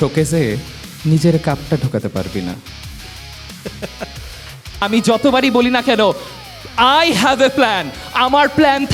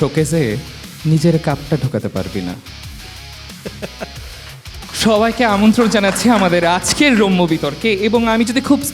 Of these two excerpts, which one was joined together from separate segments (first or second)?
first